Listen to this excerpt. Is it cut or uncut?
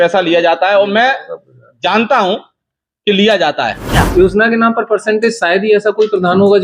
cut